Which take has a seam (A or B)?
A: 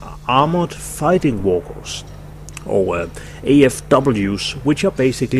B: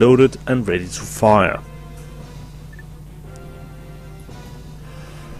A